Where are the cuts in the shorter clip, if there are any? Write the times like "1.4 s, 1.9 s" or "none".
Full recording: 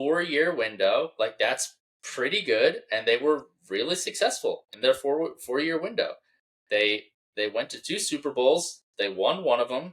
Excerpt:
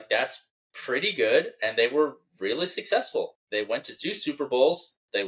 3.4 s